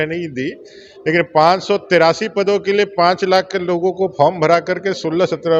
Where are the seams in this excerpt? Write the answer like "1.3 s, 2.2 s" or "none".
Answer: none